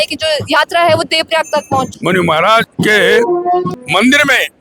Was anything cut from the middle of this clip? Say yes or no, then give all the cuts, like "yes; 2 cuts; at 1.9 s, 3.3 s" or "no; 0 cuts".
yes; 3 cuts; at 1.9 s, 2.7 s, 3.7 s